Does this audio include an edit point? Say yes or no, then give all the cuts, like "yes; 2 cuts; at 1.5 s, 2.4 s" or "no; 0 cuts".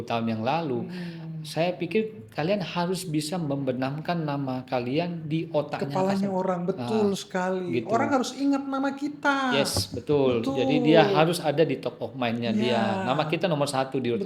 no; 0 cuts